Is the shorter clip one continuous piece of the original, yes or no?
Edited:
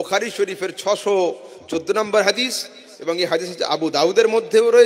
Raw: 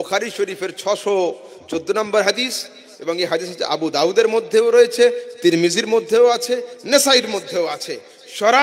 yes